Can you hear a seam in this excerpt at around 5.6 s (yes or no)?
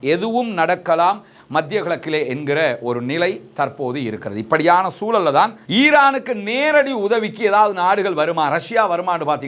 yes